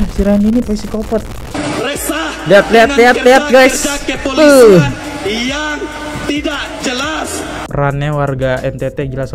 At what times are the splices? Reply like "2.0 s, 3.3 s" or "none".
1.4 s